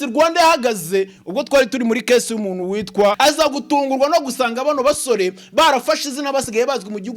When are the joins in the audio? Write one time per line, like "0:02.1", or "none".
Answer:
0:03.2